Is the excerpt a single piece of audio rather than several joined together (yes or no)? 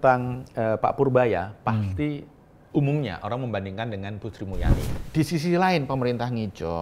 no